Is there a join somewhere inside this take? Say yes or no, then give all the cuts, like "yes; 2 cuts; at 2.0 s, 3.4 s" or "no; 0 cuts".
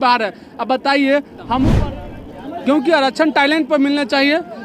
yes; 1 cut; at 1.7 s